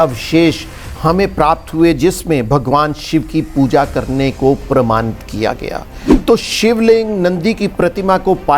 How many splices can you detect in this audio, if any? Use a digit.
1